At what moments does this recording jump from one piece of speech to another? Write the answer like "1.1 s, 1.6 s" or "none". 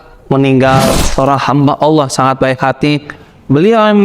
0.9 s